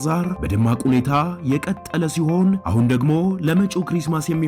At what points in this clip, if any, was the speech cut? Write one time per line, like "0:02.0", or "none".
none